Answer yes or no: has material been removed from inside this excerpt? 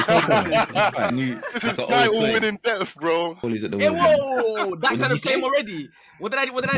yes